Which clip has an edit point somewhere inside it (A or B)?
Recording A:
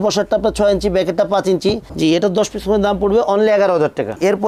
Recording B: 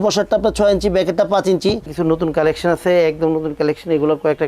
B